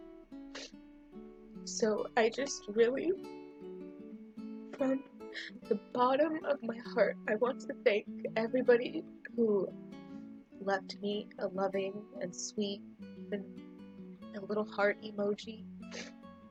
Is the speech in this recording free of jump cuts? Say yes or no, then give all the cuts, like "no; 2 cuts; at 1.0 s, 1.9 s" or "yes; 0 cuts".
yes; 0 cuts